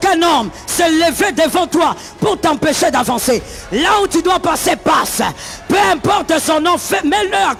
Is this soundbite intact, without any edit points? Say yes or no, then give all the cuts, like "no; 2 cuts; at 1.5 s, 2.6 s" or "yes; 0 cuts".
yes; 0 cuts